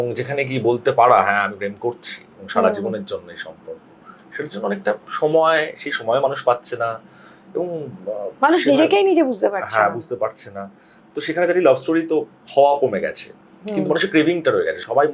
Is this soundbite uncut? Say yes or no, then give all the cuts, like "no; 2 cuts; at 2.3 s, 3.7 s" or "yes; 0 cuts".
yes; 0 cuts